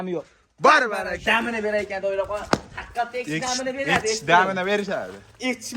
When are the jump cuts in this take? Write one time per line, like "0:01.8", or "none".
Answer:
0:01.2